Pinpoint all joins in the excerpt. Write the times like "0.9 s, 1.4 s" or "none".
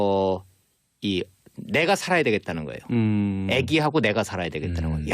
3.5 s